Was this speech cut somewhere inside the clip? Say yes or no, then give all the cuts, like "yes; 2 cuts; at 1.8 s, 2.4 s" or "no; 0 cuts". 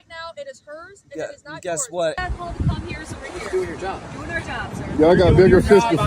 yes; 2 cuts; at 2.2 s, 5.1 s